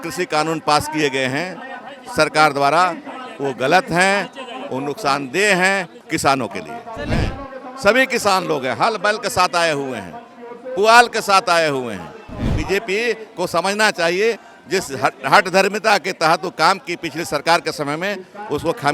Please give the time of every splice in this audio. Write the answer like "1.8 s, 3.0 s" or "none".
7.2 s, 12.5 s